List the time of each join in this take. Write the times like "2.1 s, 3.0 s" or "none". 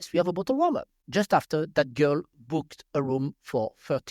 0.9 s